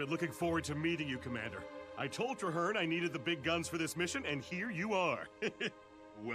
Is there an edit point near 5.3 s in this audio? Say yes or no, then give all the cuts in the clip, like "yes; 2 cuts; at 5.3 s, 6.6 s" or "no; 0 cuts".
no; 0 cuts